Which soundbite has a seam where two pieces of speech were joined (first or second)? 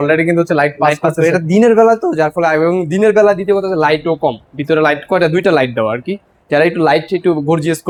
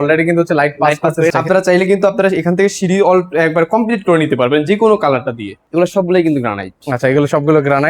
second